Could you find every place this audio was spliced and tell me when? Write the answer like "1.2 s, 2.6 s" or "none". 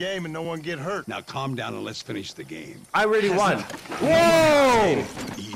1.0 s